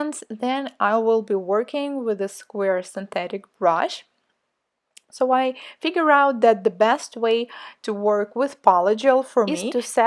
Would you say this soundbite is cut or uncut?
uncut